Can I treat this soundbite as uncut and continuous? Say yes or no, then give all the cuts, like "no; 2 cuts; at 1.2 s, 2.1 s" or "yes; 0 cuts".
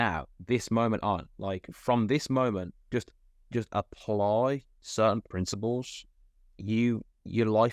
no; 1 cut; at 4.8 s